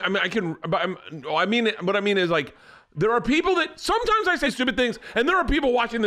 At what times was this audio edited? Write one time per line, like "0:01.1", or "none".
0:04.5